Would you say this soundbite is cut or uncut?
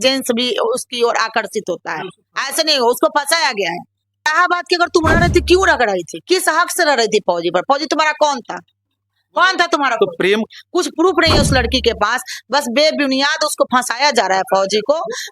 cut